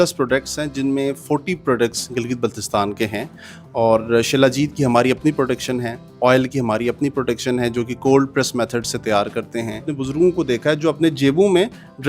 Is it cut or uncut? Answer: cut